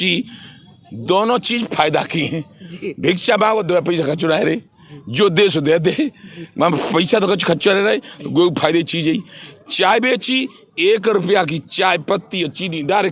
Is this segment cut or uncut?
uncut